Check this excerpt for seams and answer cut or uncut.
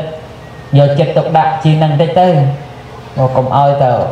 uncut